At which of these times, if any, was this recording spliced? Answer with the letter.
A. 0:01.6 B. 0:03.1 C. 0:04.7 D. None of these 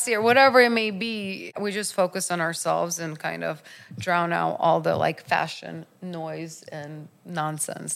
A